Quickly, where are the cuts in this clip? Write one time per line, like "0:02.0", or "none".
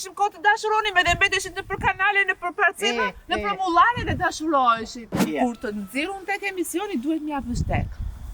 0:05.2